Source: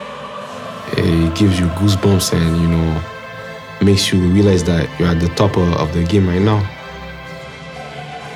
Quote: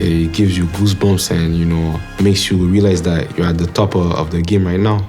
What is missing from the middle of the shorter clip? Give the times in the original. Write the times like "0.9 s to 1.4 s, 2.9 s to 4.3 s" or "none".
3.0 s to 3.6 s